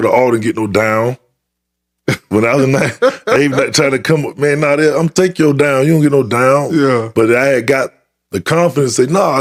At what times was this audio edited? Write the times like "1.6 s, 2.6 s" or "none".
none